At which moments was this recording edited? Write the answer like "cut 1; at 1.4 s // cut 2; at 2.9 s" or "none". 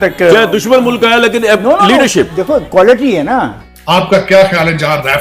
cut 1; at 3.6 s